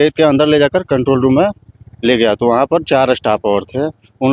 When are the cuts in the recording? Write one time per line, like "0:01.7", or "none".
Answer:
none